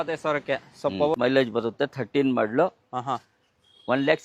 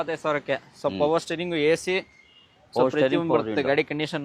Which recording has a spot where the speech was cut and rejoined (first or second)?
first